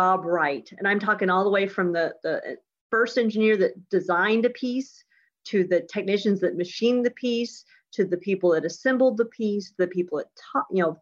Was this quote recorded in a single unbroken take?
yes; 0 cuts

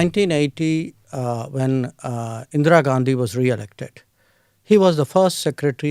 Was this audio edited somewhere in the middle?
no; 0 cuts

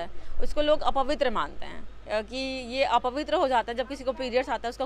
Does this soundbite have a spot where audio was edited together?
no; 0 cuts

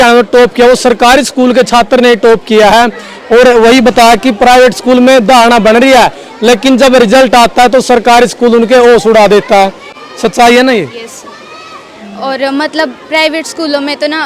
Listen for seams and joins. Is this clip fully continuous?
yes; 0 cuts

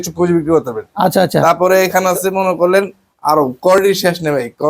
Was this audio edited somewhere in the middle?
no; 0 cuts

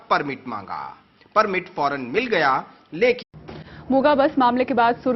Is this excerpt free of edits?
yes; 0 cuts

